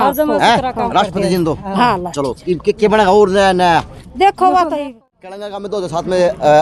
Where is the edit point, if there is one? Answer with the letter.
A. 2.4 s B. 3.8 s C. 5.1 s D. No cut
C